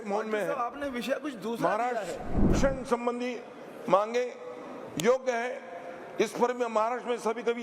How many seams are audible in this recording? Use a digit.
1